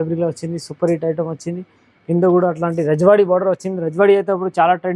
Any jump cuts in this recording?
no; 0 cuts

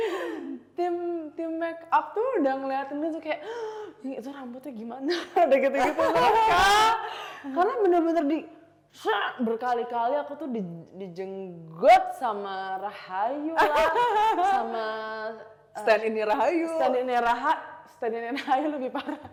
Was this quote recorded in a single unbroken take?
yes; 0 cuts

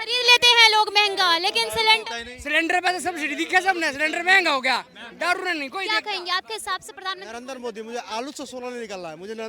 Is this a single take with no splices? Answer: no; 1 cut; at 5.9 s

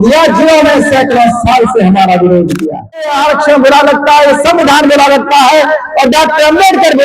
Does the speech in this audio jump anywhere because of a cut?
yes; 1 cut; at 3.2 s

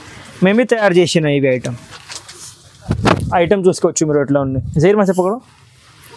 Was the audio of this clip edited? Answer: no; 0 cuts

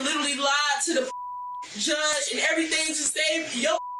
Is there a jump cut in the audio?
no; 0 cuts

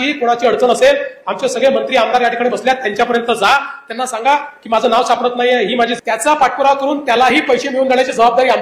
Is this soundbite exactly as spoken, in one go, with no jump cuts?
no; 1 cut; at 6.0 s

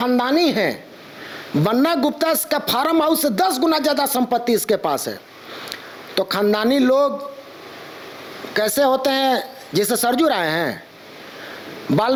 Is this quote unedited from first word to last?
yes; 0 cuts

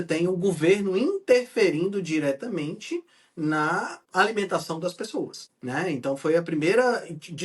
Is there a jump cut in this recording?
yes; 2 cuts; at 4.0 s, 5.5 s

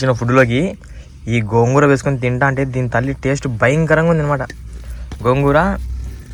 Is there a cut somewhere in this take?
no; 0 cuts

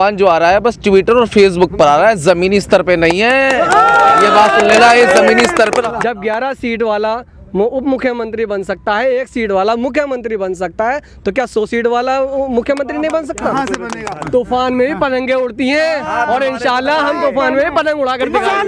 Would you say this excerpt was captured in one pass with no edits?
no; 2 cuts; at 5.8 s, 14.2 s

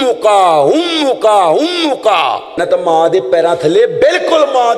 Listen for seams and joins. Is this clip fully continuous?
no; 1 cut; at 2.6 s

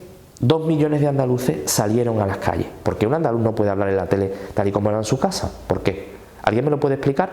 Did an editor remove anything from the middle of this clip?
yes; 1 cut; at 2.8 s

